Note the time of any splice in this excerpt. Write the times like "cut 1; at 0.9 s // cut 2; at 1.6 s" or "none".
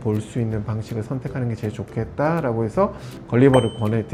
none